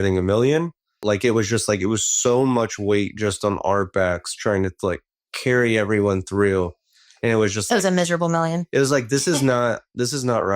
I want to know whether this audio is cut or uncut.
cut